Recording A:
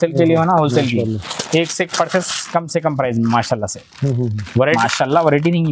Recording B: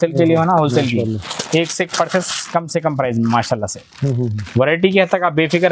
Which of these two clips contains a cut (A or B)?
A